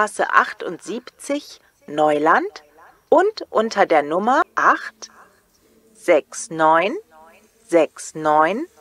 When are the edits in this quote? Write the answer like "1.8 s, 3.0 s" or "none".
4.5 s